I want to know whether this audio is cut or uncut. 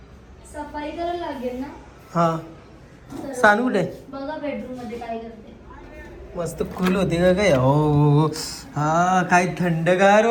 uncut